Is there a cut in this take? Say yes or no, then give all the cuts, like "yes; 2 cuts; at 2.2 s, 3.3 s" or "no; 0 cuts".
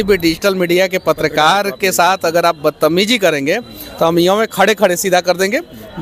no; 0 cuts